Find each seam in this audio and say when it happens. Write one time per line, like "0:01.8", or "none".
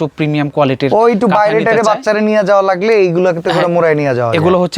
none